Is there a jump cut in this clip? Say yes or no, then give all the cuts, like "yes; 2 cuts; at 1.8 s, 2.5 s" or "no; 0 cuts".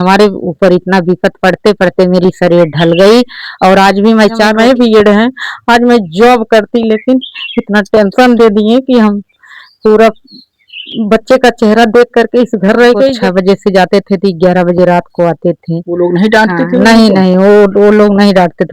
yes; 2 cuts; at 4.5 s, 13.2 s